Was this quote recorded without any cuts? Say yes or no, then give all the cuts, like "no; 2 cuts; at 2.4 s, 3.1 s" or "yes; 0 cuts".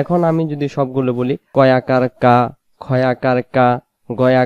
no; 1 cut; at 1.4 s